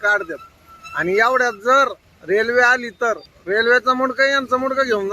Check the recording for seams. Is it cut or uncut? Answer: cut